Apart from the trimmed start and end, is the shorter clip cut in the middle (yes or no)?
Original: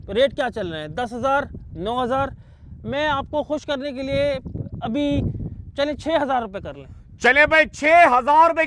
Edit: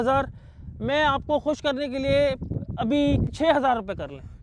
yes